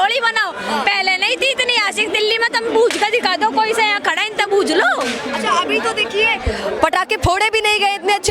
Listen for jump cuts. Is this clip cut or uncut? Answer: uncut